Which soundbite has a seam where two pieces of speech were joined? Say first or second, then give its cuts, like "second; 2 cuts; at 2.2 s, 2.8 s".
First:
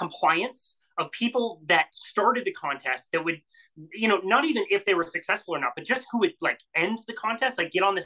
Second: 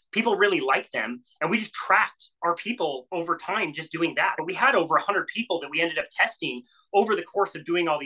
second; 1 cut; at 4.4 s